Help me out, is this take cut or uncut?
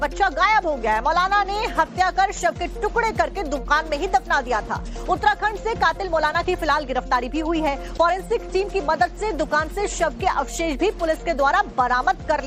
cut